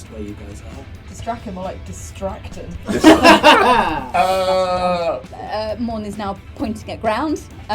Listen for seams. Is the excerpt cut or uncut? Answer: cut